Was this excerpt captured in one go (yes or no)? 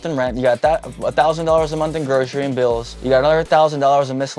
no